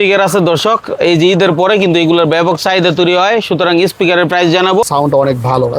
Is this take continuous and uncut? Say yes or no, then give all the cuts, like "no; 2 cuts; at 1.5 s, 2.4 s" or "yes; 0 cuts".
no; 1 cut; at 4.9 s